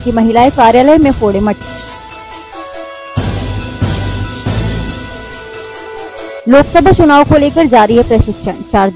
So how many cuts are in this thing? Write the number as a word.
zero